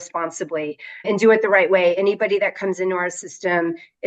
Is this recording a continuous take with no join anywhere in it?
no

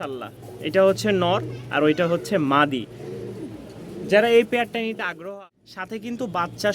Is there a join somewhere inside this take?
yes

